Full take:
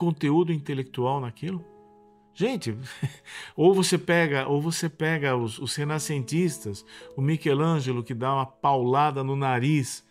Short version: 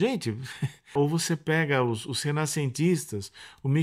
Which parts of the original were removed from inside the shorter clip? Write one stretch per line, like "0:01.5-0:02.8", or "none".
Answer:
0:03.3-0:04.4